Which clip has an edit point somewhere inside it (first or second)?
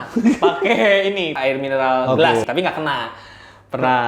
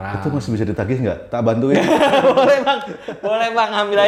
first